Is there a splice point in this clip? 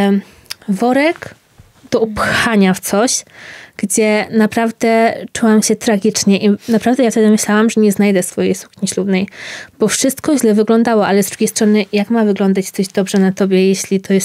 no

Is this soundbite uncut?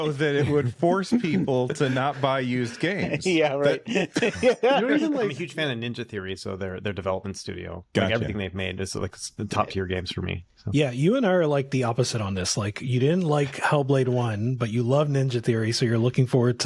no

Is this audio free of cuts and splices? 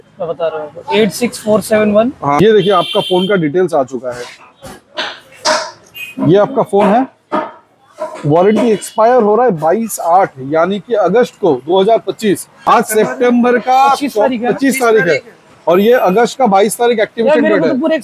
no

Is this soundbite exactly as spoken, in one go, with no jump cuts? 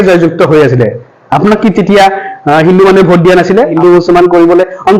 no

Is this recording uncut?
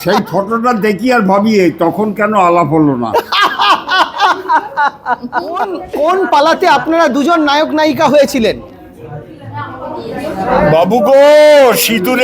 no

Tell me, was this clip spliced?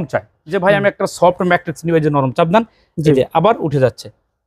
no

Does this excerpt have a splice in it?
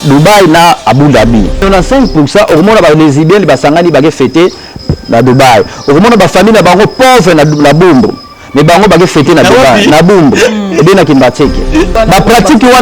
yes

